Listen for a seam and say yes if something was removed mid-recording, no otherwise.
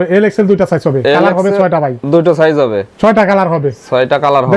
no